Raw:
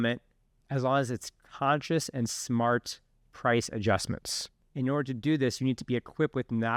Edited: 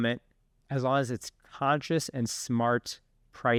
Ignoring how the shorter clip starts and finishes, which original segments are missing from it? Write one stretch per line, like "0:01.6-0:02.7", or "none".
none